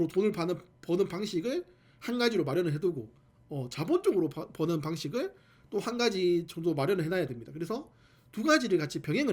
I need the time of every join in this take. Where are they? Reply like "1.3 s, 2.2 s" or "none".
none